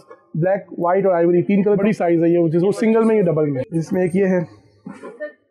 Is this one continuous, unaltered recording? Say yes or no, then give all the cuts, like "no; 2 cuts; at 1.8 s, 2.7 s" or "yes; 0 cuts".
no; 2 cuts; at 1.8 s, 3.7 s